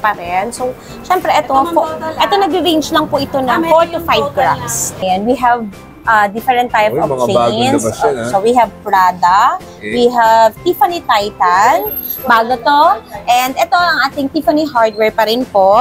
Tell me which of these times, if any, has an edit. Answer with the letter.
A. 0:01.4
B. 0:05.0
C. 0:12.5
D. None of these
B